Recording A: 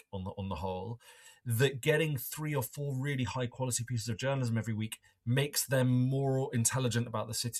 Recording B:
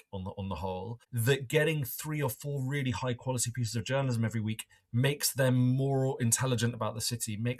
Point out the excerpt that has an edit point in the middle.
B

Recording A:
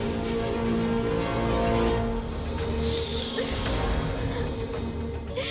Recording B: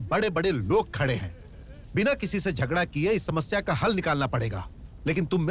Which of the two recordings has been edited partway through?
A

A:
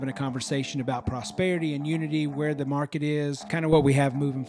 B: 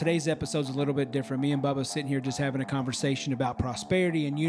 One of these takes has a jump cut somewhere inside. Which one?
A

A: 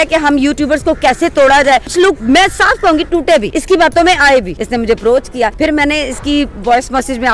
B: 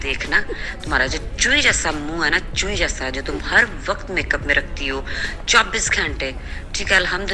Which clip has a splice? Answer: A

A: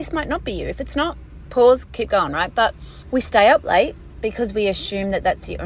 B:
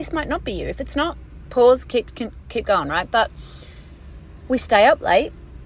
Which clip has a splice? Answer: A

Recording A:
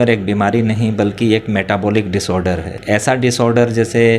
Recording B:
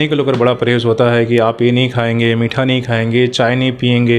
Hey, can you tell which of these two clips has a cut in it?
A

